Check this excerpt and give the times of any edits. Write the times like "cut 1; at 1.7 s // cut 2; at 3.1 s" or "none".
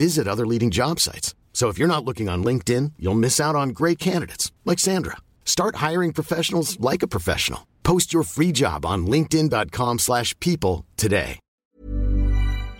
cut 1; at 11.7 s